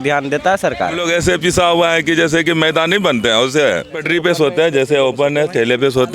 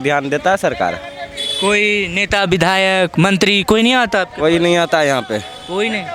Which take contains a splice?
first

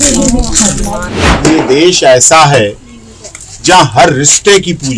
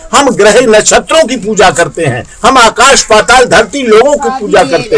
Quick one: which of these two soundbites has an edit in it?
first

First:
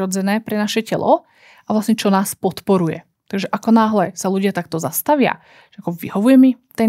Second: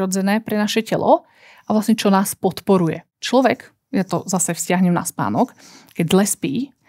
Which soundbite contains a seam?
second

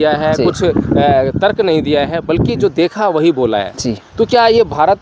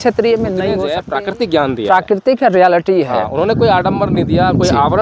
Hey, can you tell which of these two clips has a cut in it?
second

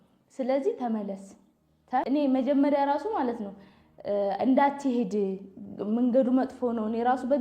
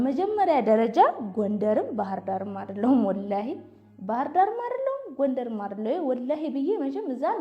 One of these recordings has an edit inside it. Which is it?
first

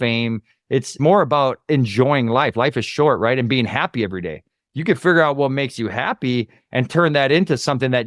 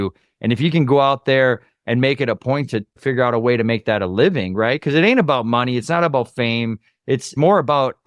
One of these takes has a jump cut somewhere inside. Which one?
second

